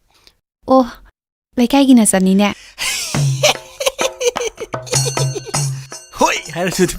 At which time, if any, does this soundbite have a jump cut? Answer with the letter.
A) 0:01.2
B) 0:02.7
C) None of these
C